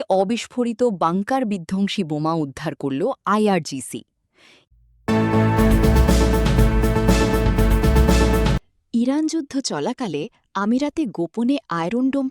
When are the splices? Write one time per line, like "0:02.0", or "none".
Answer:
0:04.5
0:08.7